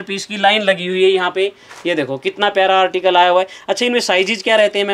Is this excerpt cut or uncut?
uncut